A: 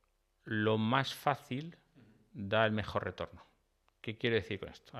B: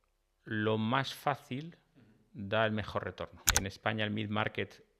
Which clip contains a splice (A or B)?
B